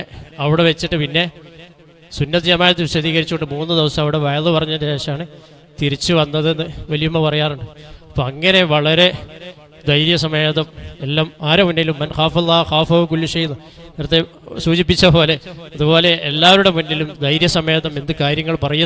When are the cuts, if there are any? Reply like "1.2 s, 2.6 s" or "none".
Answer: none